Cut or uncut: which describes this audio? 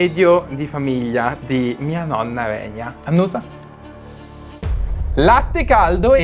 cut